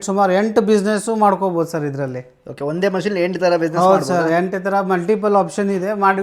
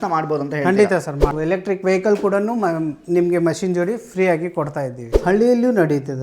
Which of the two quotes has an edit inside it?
second; 2 cuts; at 1.4 s, 5.0 s

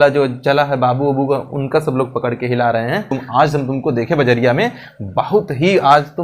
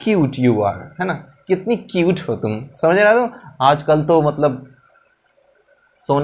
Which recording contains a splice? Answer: first; 1 cut; at 3.1 s

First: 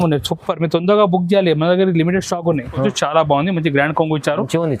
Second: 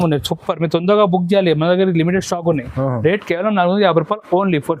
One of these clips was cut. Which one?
first; 1 cut; at 2.9 s

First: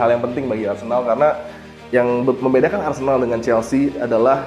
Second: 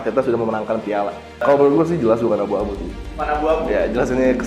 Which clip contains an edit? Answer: second; 1 cut; at 1.4 s

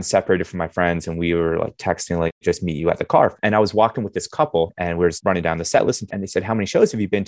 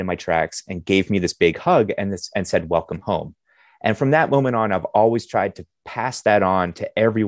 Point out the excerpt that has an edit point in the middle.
first; 4 cuts; at 2.4 s, 3.4 s, 5.1 s, 6.1 s

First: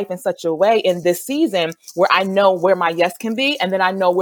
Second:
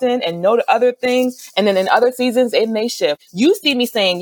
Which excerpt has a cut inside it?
second; 1 cut; at 3.2 s

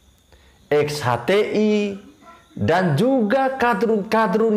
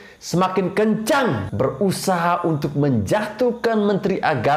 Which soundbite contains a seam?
second; 1 cut; at 1.5 s

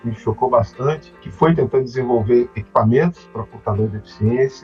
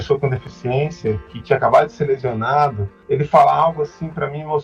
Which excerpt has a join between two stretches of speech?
second; 1 cut; at 2.9 s

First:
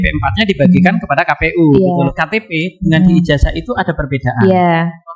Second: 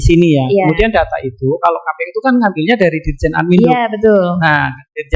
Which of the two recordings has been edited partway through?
first; 1 cut; at 2.1 s

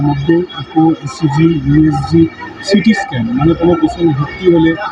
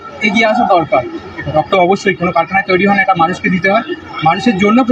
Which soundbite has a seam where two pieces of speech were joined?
second; 1 cut; at 1.6 s

